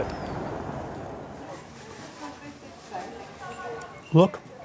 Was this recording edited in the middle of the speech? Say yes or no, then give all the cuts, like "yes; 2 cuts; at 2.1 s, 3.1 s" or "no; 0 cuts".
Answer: yes; 1 cut; at 1.3 s